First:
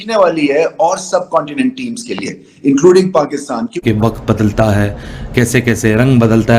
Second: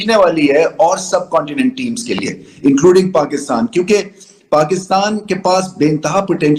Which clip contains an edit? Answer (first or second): first